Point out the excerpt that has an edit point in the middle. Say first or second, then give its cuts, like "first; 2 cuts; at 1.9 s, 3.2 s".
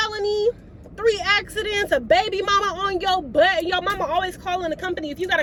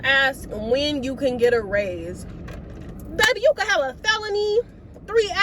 second; 1 cut; at 2.9 s